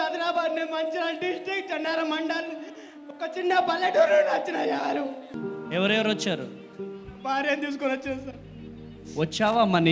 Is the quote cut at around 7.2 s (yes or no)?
no